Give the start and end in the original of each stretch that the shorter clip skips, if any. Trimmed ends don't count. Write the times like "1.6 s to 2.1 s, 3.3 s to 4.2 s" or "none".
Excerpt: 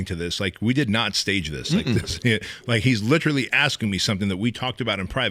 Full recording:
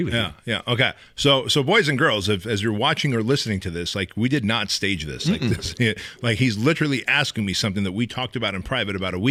none